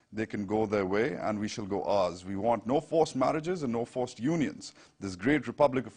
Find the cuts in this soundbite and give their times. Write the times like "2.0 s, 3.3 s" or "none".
none

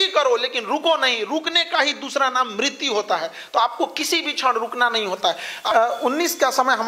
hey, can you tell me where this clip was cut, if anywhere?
5.5 s

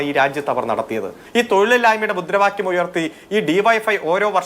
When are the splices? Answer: 1.2 s

